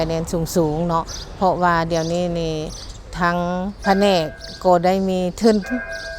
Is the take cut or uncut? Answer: cut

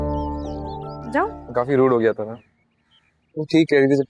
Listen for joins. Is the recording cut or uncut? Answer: cut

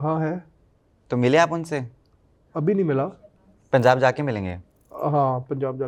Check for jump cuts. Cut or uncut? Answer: uncut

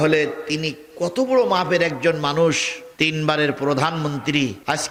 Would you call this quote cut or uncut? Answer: uncut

